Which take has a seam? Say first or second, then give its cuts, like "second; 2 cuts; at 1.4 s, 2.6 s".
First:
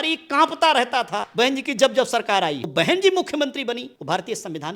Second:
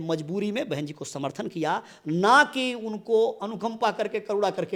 first; 3 cuts; at 1.2 s, 2.7 s, 3.9 s